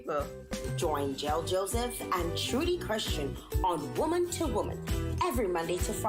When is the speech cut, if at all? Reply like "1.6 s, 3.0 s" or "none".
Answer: none